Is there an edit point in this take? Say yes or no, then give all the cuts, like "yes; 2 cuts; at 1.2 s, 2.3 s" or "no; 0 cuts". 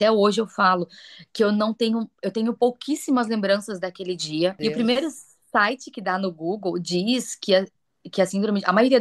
yes; 1 cut; at 4.6 s